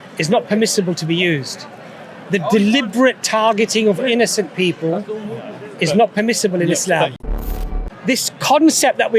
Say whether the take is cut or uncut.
cut